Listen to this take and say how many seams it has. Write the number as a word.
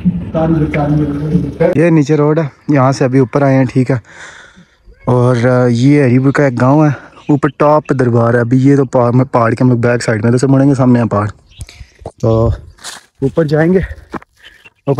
one